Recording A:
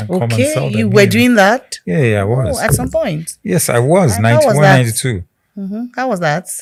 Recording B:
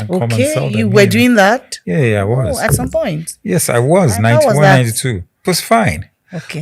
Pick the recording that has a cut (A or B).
B